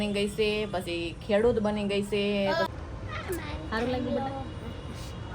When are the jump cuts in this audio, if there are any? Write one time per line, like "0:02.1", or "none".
0:02.7